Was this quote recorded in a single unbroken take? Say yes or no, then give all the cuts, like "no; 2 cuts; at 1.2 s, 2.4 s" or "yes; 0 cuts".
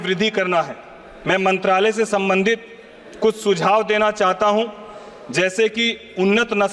yes; 0 cuts